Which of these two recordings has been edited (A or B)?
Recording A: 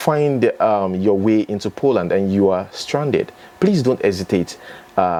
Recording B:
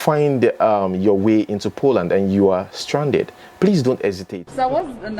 B